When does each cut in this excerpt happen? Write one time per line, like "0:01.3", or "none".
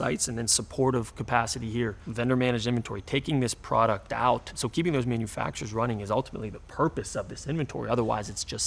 0:02.0
0:04.6